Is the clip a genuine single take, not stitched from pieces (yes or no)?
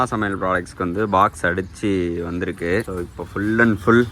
no